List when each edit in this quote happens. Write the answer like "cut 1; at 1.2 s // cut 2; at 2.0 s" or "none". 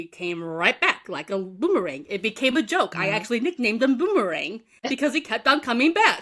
none